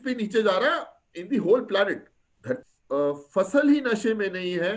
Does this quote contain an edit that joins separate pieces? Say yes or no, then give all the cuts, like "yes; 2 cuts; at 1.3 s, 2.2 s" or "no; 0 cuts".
yes; 1 cut; at 2.7 s